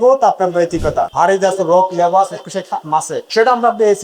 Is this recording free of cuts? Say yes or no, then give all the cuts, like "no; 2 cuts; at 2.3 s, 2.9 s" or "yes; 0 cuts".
no; 1 cut; at 1.1 s